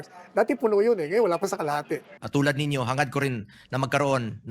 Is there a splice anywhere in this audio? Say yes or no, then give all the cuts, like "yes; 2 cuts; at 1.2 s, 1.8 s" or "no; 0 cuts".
yes; 1 cut; at 2.2 s